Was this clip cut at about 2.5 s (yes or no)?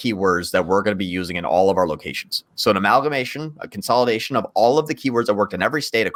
no